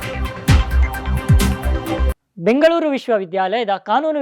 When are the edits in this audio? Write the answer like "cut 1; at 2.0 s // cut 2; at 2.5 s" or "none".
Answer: cut 1; at 2.2 s